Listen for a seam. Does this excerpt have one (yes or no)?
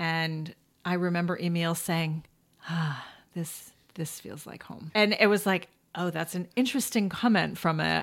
yes